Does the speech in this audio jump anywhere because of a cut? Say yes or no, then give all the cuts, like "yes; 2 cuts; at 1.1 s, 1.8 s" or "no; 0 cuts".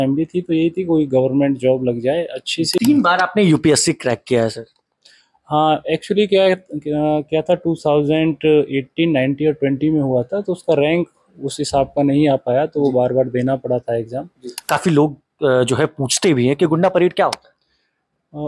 yes; 2 cuts; at 2.8 s, 14.5 s